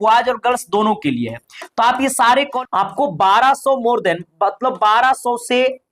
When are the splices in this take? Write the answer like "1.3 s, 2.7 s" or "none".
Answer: 2.5 s